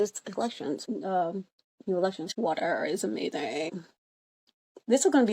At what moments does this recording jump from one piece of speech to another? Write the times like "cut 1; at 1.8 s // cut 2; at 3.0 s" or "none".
cut 1; at 0.8 s // cut 2; at 2.3 s // cut 3; at 3.8 s